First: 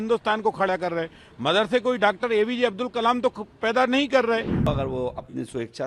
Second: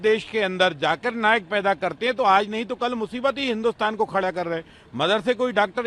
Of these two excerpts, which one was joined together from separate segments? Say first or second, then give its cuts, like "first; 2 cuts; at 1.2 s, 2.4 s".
first; 1 cut; at 4.7 s